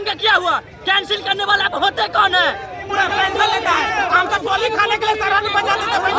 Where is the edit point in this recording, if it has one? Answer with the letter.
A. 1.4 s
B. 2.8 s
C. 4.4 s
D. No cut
B